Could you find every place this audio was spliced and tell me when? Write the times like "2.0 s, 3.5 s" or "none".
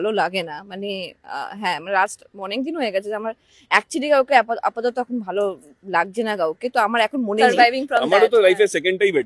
7.3 s